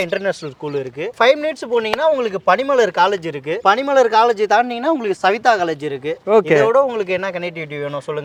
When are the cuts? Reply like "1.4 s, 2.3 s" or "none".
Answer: none